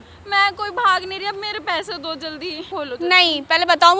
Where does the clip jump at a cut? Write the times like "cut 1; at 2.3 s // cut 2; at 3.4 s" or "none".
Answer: cut 1; at 2.7 s